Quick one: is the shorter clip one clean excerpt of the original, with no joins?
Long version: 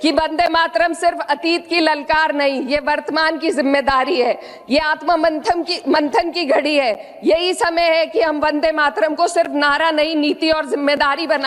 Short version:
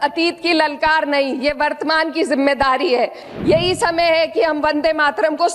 no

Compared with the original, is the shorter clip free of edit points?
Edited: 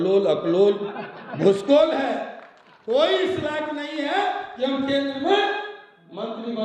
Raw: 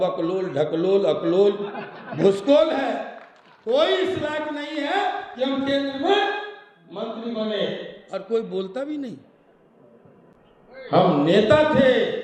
yes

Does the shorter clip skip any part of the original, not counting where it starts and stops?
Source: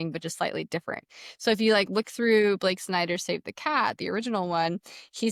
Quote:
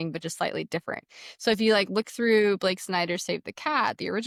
no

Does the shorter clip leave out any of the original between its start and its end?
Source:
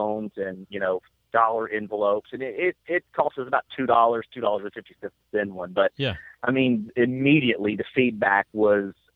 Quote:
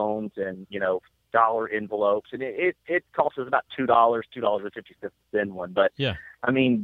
no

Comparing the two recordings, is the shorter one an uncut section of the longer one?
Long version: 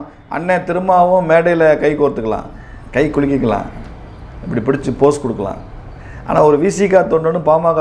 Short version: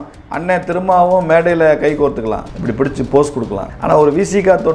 no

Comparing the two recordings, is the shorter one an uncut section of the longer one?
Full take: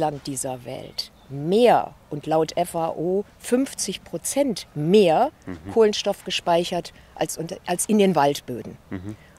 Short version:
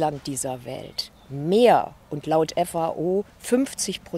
yes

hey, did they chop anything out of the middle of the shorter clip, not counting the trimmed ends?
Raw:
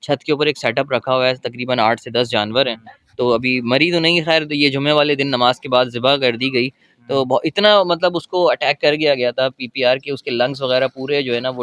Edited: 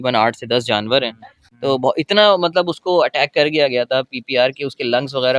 yes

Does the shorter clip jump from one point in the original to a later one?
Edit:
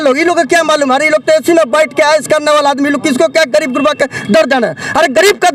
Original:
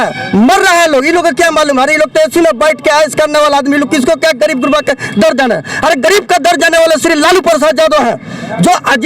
no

